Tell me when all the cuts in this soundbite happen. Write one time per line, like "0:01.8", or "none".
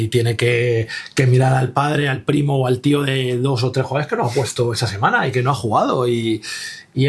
none